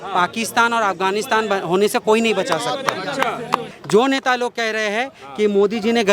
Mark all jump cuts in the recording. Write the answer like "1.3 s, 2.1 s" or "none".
3.7 s